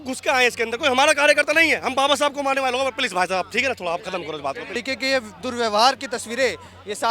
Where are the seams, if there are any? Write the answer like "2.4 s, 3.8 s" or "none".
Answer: 4.8 s

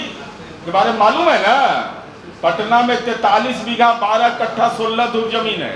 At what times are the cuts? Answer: none

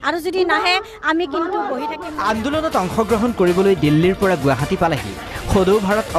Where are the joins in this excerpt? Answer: 2.0 s

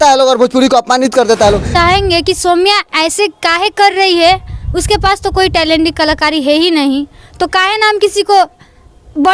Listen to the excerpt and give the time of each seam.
1.7 s

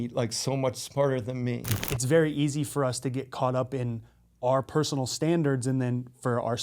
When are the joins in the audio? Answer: 1.8 s

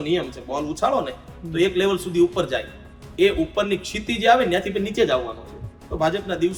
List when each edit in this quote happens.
none

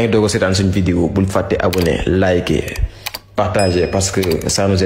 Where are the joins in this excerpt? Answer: none

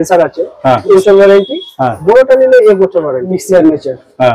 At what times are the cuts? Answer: 0.9 s, 3.3 s

